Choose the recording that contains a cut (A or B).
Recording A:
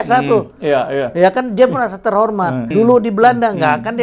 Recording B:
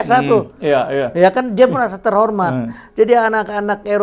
A